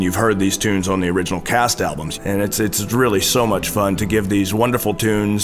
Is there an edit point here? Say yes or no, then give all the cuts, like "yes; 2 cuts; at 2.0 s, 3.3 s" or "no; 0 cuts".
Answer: yes; 1 cut; at 2.1 s